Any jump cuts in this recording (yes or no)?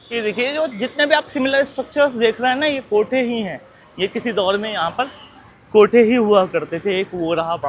no